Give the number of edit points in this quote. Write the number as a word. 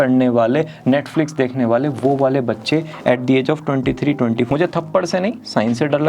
one